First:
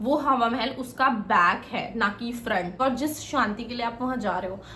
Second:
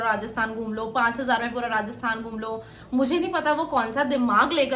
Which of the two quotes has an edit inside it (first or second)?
first